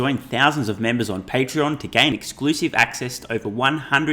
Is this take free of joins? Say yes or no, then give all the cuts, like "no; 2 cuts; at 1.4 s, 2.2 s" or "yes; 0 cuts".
yes; 0 cuts